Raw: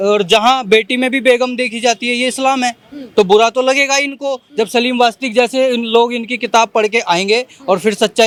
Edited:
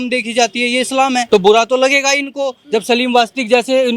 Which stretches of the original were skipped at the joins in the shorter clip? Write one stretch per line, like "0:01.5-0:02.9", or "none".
0:02.7-0:03.1